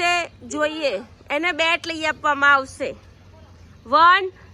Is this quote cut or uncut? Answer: uncut